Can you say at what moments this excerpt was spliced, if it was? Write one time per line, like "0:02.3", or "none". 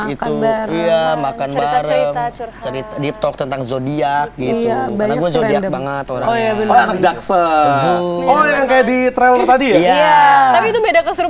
0:08.1